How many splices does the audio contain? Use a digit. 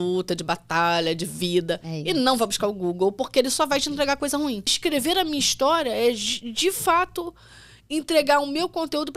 1